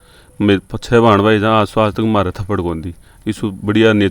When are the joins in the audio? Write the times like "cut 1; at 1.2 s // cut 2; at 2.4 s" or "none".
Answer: none

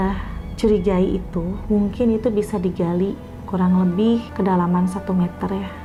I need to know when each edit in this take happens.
none

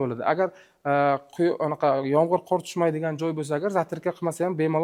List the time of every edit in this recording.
none

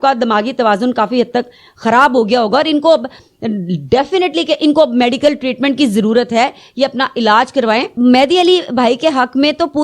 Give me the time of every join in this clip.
cut 1; at 7.9 s

